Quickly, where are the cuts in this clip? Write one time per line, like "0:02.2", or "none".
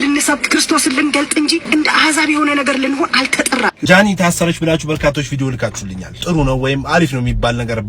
0:01.6
0:03.8
0:06.1